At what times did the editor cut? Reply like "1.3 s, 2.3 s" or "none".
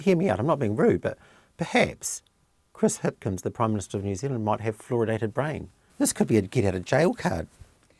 5.8 s